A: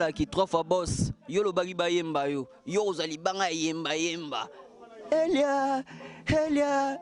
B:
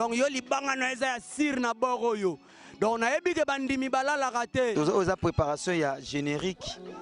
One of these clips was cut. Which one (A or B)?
B